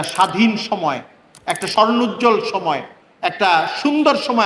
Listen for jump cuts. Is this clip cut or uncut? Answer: cut